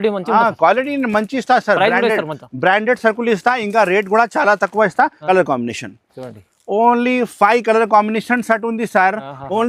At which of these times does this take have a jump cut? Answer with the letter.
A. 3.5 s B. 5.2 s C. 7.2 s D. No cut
B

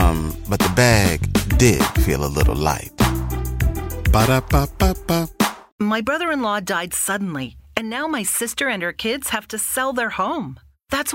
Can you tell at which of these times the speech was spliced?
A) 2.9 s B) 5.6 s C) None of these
B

